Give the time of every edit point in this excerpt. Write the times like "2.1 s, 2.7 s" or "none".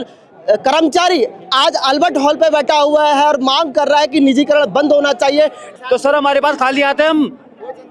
5.7 s